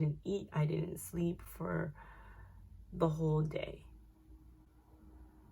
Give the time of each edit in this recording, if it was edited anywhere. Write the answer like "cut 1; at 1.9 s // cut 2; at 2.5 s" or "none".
none